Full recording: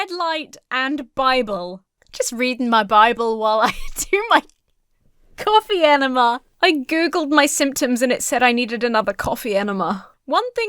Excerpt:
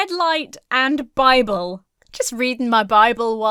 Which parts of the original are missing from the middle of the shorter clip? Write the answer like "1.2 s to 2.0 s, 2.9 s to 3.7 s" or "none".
none